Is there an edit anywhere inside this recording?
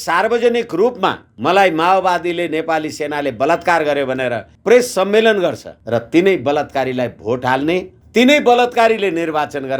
yes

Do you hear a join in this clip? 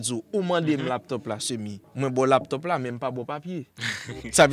yes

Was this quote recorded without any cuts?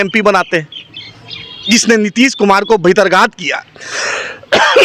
yes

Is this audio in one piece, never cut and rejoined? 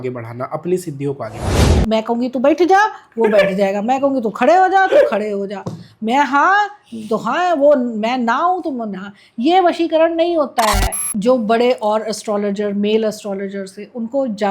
no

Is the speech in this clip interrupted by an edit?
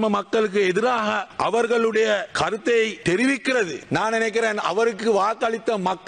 yes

